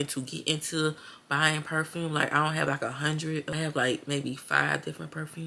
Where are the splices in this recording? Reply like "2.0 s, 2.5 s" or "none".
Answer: none